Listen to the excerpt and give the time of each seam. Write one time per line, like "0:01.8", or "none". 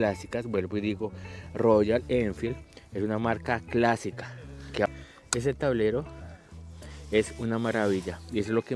0:04.9